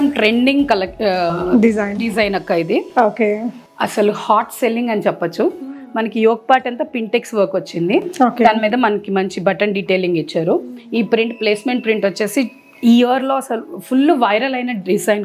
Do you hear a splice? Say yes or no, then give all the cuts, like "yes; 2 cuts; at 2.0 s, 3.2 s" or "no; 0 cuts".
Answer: no; 0 cuts